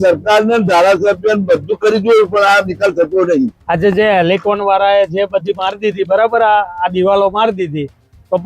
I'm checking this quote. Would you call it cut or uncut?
cut